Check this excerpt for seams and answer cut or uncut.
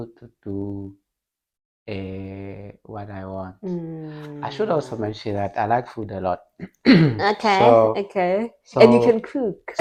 uncut